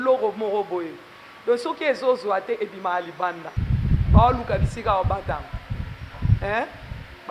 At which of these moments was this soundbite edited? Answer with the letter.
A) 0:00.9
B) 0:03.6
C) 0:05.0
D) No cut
B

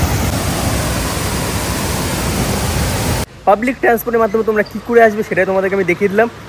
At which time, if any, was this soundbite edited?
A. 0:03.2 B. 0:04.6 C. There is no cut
A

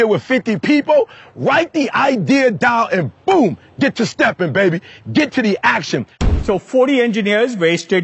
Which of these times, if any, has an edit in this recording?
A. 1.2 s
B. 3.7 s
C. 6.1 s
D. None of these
C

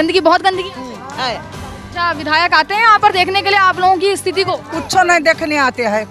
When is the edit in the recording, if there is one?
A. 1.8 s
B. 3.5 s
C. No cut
A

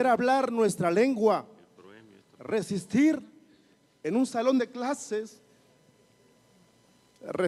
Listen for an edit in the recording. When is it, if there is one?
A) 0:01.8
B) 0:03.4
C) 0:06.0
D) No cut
D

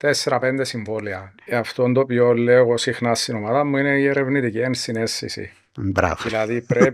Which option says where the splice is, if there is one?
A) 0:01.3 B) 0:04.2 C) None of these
A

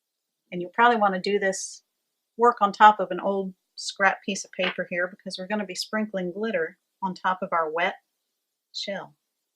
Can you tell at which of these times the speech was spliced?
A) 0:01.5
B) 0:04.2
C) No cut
B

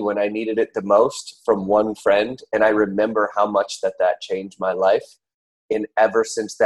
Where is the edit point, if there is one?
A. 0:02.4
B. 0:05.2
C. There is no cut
C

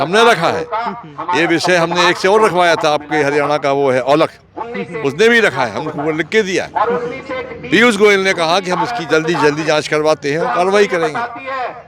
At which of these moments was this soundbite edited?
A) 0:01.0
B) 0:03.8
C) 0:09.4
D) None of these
D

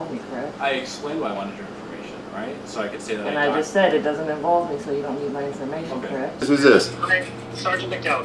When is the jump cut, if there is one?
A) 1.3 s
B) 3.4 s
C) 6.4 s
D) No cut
C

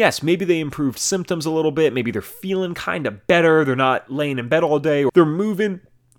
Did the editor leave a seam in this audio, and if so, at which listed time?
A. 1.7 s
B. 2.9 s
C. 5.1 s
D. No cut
C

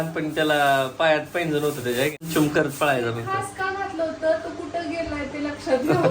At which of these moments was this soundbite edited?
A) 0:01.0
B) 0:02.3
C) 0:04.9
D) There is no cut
B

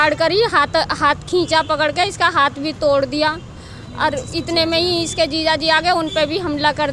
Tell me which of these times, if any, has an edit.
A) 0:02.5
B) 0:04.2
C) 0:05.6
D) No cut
D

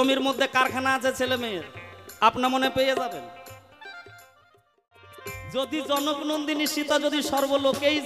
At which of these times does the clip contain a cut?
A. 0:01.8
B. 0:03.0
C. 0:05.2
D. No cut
C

